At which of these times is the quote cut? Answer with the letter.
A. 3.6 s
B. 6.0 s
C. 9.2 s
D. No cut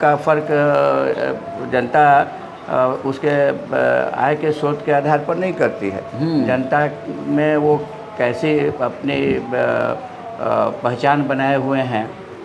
D